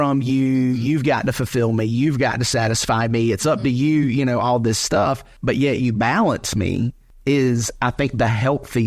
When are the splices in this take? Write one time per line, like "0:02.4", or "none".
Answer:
0:05.3
0:07.0